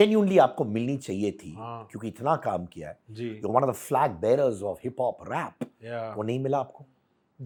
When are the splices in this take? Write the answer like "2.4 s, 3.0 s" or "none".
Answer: none